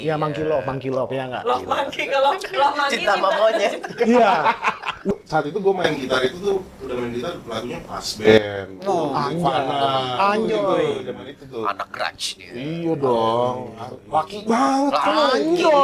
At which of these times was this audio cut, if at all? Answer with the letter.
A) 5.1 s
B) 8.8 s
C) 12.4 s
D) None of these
A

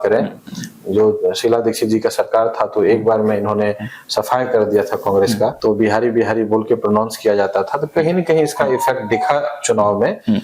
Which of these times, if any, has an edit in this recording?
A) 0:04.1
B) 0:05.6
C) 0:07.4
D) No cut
B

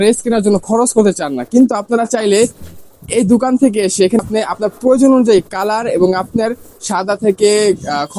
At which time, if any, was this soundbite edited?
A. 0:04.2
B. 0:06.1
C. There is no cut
A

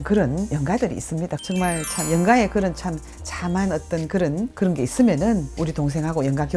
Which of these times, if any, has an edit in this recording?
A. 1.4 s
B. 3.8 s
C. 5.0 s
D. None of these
A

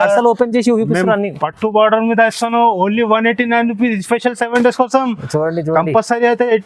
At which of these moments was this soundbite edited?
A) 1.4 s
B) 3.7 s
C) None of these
C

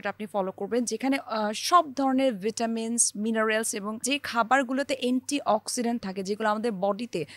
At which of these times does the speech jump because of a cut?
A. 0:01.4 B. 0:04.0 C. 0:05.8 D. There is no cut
B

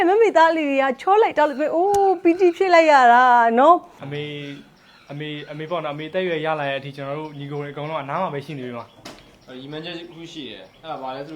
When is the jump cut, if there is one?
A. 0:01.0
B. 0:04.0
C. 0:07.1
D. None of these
B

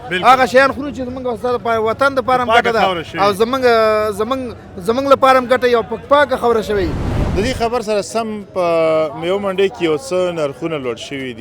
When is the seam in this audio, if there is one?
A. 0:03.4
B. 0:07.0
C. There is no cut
B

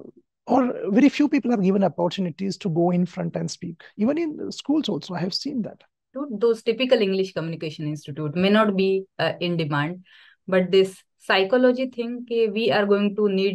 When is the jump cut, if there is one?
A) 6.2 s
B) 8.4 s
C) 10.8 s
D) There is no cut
A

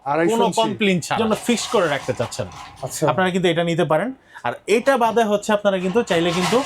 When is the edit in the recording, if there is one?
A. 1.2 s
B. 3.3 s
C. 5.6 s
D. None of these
A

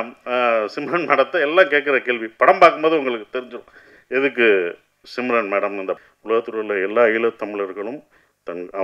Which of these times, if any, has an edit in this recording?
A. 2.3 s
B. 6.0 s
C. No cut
B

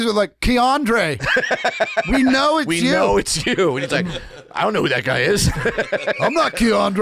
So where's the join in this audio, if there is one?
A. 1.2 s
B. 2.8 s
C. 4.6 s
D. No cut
D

